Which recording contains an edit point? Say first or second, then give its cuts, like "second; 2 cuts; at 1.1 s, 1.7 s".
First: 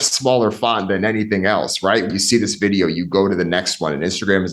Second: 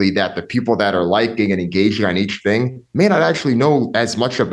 first; 1 cut; at 2.1 s